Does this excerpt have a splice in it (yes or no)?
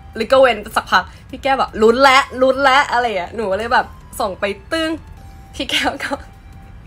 no